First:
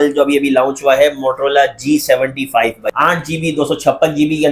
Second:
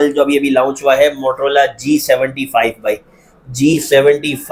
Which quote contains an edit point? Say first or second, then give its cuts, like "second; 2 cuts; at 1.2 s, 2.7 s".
first; 1 cut; at 2.8 s